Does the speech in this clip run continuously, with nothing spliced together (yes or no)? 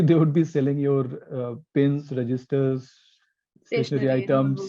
yes